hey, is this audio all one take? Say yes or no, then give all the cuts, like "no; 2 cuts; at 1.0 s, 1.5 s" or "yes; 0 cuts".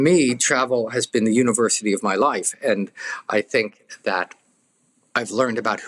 yes; 0 cuts